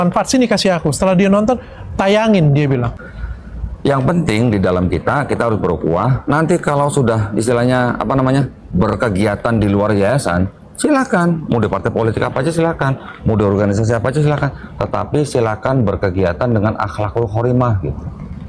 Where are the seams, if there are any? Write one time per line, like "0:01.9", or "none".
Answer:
0:03.0